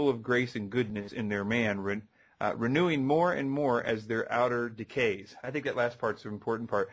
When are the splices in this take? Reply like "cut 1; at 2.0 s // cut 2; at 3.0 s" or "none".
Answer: none